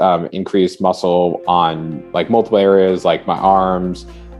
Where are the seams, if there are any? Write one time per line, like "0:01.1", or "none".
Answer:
none